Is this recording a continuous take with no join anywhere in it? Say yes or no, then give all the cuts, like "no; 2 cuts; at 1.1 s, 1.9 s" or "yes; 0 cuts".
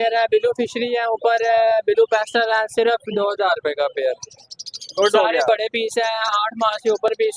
yes; 0 cuts